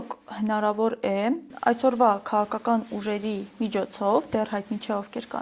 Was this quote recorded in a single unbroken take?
no; 1 cut; at 1.5 s

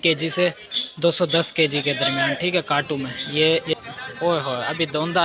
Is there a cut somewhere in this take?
yes; 1 cut; at 3.2 s

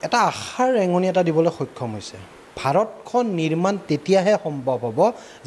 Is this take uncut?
no; 1 cut; at 2.6 s

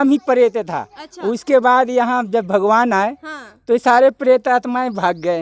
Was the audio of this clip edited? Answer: no; 0 cuts

